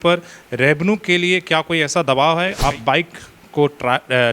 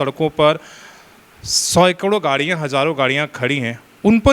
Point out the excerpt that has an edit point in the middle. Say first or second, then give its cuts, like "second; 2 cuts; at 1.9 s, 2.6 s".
first; 1 cut; at 2.6 s